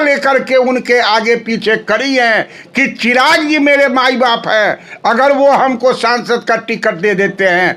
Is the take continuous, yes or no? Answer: yes